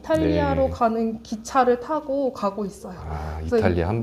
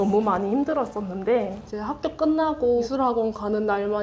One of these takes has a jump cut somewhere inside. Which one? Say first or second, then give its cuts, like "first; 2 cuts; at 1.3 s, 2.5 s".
second; 2 cuts; at 1.6 s, 2.9 s